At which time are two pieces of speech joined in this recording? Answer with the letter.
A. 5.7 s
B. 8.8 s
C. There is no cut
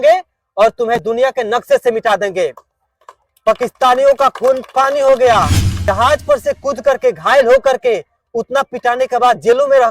A